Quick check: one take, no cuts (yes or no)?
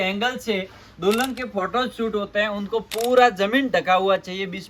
yes